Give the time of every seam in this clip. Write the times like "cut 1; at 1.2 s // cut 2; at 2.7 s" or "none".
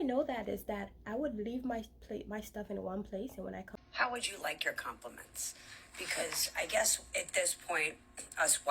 cut 1; at 3.7 s